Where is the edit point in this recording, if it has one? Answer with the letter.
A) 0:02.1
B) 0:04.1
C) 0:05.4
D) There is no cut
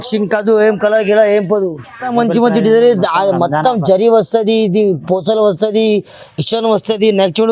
A